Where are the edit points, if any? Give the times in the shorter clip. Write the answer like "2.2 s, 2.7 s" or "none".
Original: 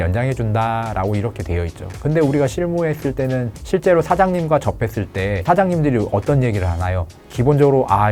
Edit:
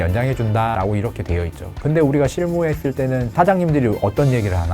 0.7 s, 3.3 s